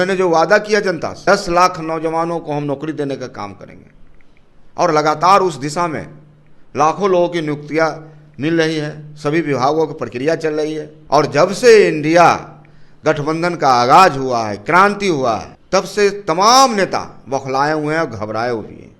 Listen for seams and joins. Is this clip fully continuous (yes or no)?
no